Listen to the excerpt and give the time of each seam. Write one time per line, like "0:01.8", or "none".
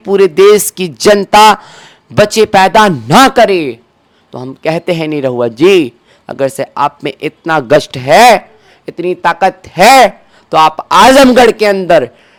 none